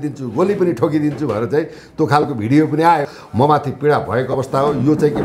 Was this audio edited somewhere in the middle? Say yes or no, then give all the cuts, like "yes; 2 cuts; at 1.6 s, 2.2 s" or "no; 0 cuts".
yes; 1 cut; at 3.2 s